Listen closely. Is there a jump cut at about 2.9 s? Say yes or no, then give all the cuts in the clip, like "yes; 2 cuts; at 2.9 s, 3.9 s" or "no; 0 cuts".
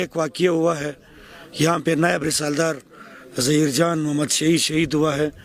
no; 0 cuts